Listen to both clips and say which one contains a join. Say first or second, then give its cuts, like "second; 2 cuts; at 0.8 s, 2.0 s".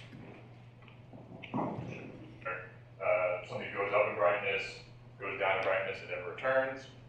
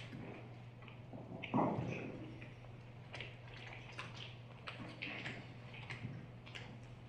second; 1 cut; at 2.5 s